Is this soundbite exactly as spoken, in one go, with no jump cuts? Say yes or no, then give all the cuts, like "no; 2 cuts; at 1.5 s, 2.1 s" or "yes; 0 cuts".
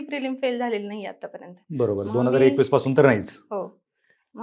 yes; 0 cuts